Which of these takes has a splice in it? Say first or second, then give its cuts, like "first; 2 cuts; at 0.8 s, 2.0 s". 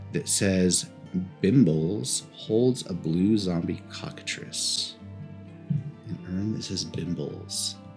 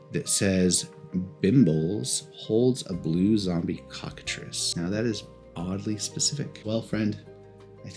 second; 2 cuts; at 4.6 s, 6.6 s